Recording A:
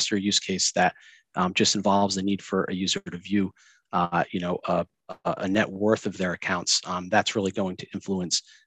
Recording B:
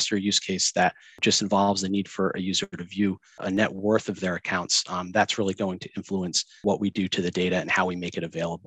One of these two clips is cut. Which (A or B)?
B